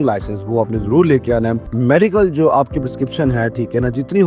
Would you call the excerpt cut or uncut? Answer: cut